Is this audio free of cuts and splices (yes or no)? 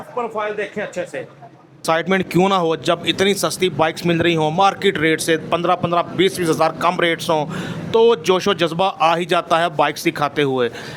no